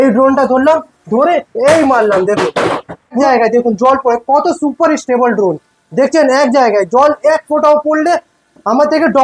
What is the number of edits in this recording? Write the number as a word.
one